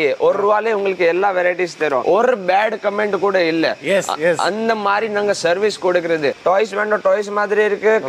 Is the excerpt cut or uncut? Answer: cut